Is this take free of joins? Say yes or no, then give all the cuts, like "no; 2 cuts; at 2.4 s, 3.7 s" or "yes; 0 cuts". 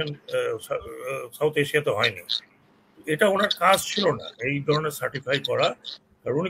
yes; 0 cuts